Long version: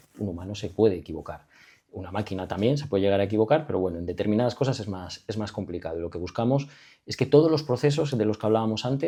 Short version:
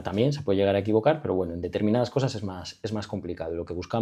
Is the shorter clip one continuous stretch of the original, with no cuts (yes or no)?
yes